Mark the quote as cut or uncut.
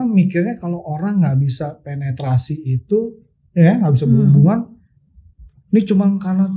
uncut